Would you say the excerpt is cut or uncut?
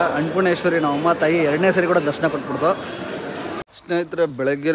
cut